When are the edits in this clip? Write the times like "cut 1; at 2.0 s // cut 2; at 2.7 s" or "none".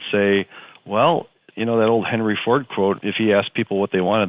cut 1; at 1.4 s // cut 2; at 3.0 s